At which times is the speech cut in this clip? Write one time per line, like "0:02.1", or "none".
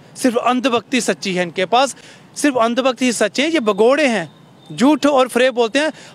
none